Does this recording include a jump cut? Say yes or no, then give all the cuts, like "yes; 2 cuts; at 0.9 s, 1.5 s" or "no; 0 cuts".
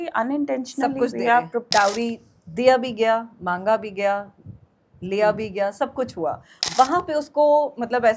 yes; 2 cuts; at 1.7 s, 6.5 s